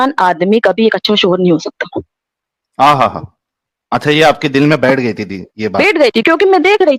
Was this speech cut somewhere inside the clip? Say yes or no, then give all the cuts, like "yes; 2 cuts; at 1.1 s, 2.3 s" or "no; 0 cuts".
no; 0 cuts